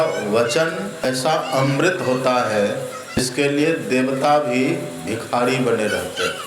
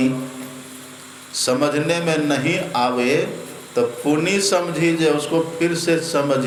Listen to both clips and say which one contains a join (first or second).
first